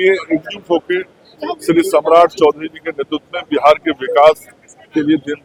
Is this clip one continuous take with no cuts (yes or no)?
yes